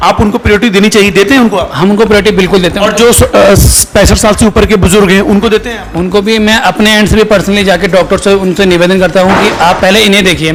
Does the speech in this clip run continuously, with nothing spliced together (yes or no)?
yes